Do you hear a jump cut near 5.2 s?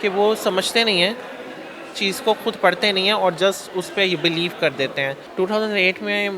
yes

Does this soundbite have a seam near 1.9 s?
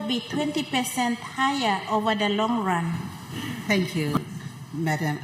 no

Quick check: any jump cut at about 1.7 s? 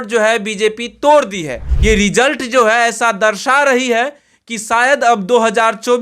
yes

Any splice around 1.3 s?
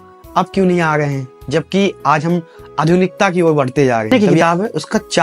no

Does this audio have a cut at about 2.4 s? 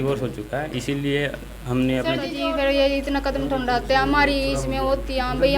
yes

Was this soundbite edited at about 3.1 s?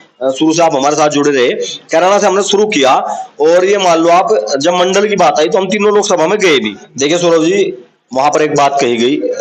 no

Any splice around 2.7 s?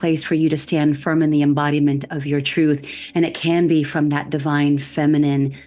no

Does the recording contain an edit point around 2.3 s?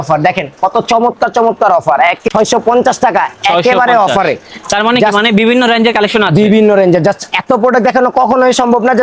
yes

